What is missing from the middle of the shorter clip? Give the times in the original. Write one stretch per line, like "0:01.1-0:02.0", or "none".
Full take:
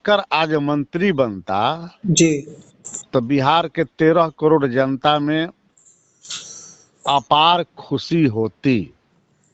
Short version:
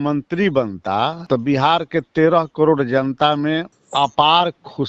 0:01.8-0:03.0
0:05.6-0:06.9